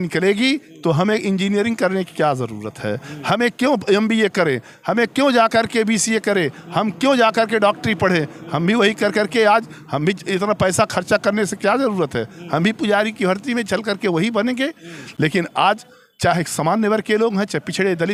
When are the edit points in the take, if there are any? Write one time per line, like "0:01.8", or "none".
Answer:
none